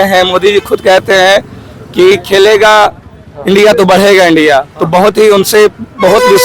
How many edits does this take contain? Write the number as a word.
zero